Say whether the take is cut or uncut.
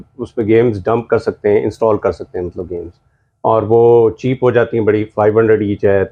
uncut